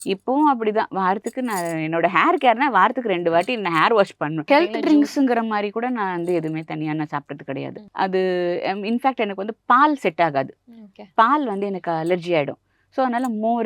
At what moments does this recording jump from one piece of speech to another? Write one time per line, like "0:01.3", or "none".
0:04.4
0:07.8